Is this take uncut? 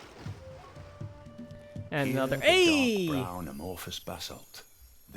yes; 0 cuts

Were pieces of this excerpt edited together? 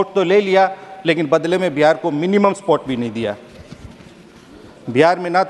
no; 0 cuts

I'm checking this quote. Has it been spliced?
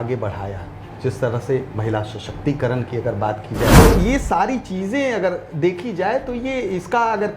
yes; 1 cut; at 3.8 s

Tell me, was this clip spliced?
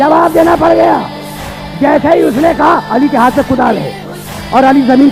no; 0 cuts

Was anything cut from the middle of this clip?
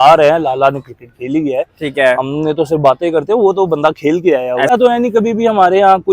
yes; 1 cut; at 4.7 s

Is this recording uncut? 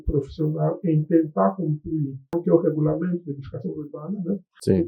no; 1 cut; at 2.4 s

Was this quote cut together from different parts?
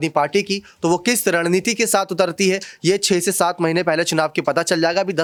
no; 0 cuts

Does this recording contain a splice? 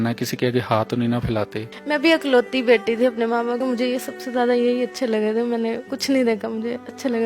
yes; 3 cuts; at 1.7 s, 3.6 s, 5.9 s

